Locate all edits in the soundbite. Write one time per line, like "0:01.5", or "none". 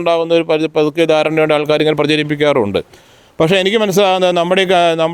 none

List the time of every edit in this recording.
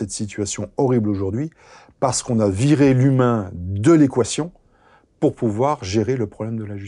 none

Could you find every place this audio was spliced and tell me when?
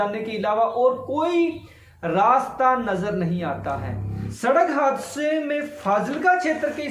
0:04.2

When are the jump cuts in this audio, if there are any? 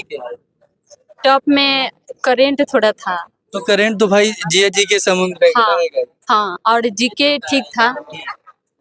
none

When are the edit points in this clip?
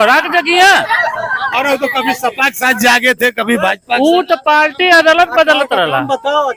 none

